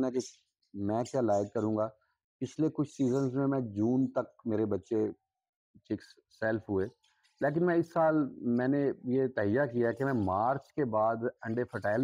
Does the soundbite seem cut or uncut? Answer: uncut